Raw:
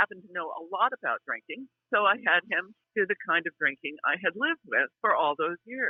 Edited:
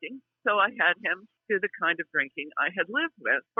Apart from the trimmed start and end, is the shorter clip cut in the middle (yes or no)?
no